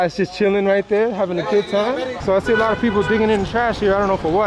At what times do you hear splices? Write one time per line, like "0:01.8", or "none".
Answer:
0:02.1

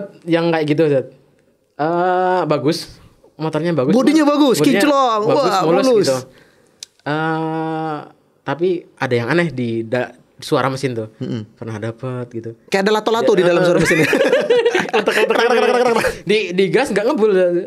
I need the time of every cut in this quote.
none

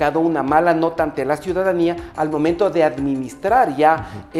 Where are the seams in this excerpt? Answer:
none

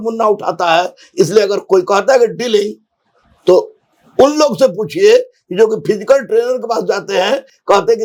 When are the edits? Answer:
none

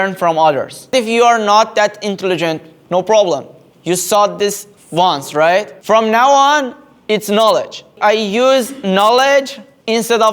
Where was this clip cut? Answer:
0:00.9
0:07.9

